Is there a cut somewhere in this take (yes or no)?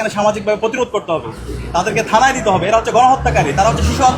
no